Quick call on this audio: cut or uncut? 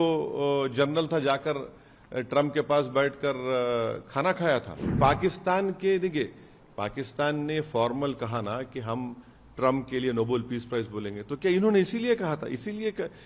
cut